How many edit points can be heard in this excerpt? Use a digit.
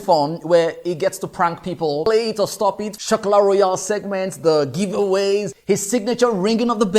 2